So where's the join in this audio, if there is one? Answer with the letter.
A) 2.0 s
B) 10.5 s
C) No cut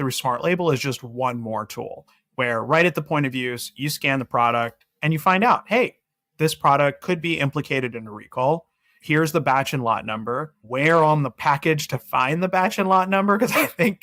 C